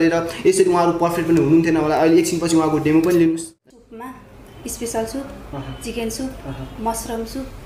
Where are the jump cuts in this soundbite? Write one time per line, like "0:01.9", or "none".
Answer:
0:03.5